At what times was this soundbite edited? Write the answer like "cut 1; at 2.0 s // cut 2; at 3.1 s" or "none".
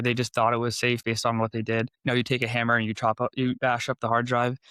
cut 1; at 1.9 s // cut 2; at 3.6 s